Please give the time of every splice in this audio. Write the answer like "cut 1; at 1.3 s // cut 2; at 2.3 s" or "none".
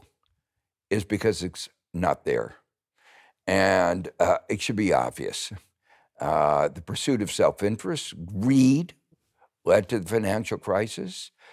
none